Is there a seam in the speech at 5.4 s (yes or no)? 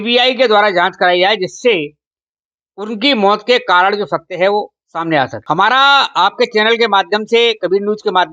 yes